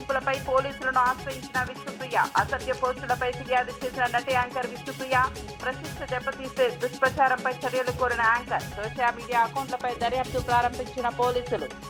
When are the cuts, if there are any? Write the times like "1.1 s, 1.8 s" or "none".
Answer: none

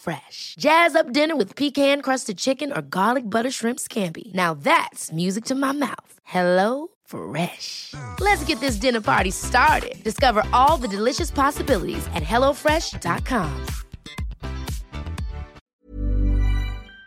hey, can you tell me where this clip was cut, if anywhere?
15.8 s

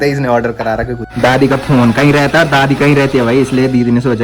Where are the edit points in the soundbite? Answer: 1.0 s

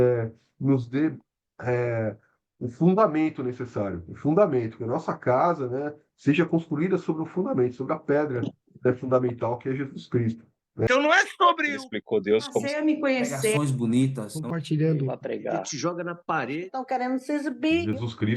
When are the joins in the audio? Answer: 10.9 s

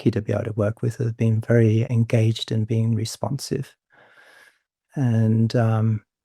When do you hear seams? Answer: none

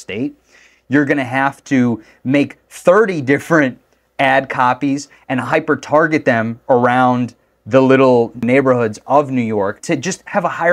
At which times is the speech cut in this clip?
8.4 s, 9.8 s

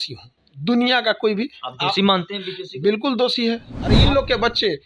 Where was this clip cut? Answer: 3.8 s

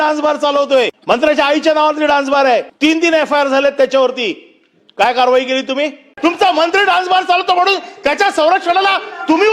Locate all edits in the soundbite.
1.0 s, 2.7 s, 6.1 s

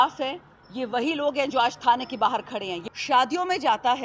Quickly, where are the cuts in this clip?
2.7 s

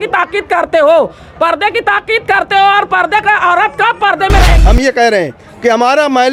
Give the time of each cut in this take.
4.5 s

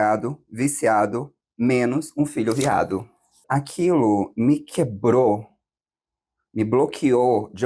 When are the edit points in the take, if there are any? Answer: 3.4 s

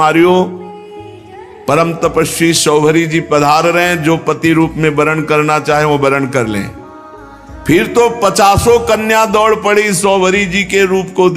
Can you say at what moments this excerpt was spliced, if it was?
none

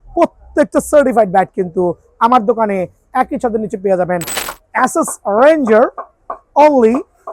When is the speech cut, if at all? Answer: 4.3 s

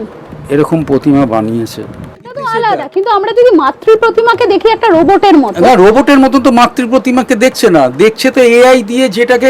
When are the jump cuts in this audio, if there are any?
2.4 s

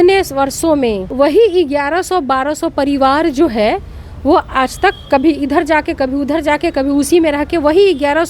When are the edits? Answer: 1.0 s

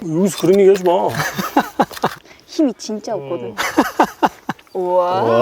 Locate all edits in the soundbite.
2.3 s, 4.5 s

